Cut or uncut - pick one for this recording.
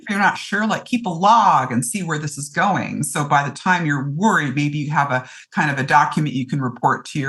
uncut